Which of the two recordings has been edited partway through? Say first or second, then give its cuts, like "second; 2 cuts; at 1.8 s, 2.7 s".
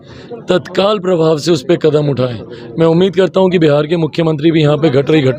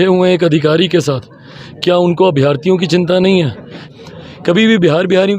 second; 1 cut; at 3.9 s